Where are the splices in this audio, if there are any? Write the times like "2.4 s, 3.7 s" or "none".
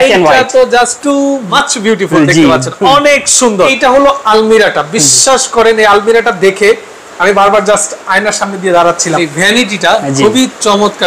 1.3 s, 3.7 s, 9.2 s